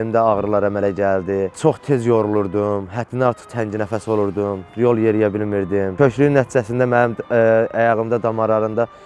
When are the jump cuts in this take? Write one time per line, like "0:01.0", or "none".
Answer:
0:01.5